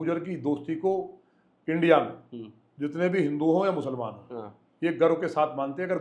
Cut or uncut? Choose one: uncut